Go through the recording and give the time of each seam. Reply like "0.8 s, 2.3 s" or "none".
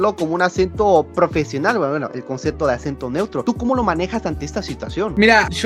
none